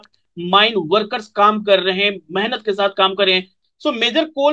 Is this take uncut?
no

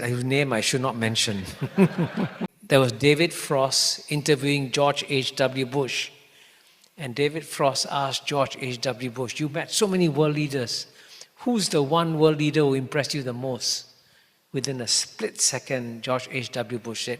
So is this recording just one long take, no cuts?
no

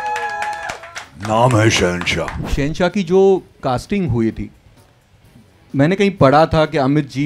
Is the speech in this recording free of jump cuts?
no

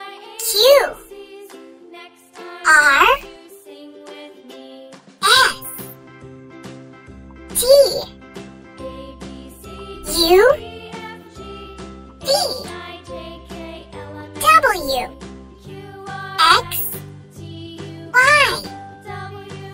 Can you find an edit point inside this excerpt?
no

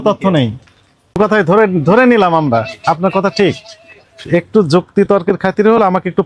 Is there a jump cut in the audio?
yes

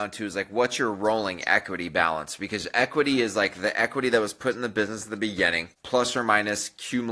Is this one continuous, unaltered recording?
no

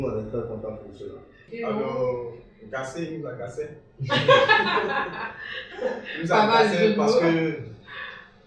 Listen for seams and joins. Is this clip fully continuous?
no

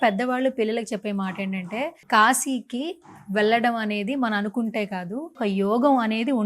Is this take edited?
yes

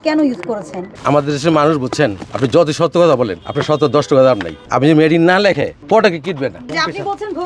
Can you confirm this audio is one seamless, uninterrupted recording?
no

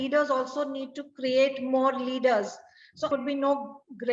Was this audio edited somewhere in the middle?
yes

